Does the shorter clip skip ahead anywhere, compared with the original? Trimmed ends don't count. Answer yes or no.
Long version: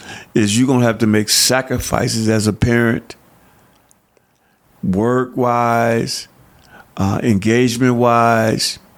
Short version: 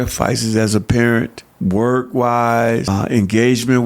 yes